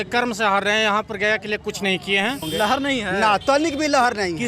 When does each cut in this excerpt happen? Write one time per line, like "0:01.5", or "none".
0:02.5